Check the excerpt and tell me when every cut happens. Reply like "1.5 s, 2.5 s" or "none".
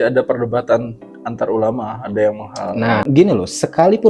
3.1 s